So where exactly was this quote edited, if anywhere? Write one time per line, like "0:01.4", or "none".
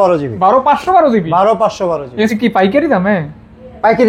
0:02.3